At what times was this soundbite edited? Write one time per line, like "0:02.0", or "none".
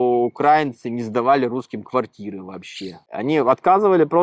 0:03.1